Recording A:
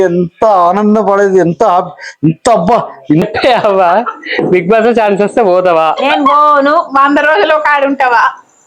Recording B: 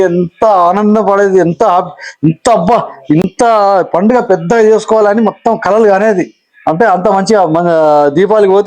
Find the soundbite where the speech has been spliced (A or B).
A